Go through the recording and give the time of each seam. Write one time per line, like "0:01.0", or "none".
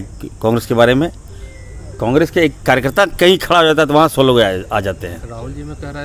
none

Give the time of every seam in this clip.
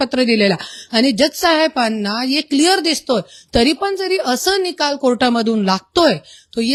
none

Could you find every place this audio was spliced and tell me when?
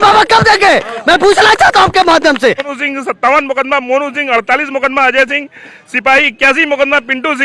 0:02.7

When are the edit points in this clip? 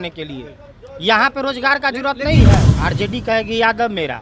0:02.7

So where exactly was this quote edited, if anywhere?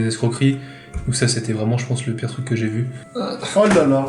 0:03.0

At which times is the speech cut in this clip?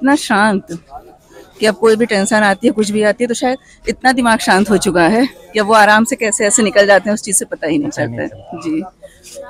none

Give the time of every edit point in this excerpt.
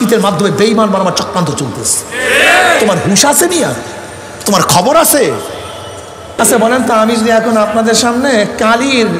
0:06.4

